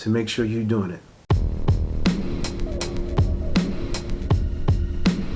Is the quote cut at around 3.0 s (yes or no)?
no